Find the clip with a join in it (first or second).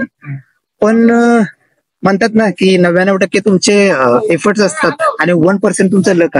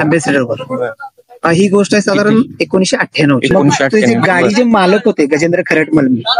second